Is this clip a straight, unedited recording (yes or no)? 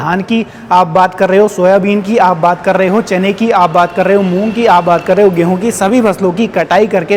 yes